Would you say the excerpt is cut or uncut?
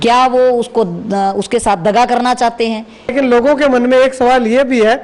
cut